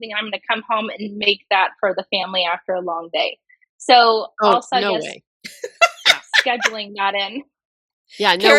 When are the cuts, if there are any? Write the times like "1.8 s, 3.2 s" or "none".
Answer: none